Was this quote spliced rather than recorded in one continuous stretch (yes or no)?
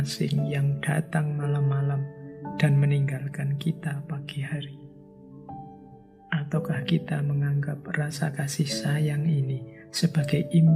no